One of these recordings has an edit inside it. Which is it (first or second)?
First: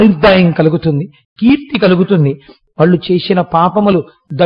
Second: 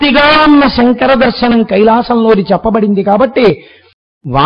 first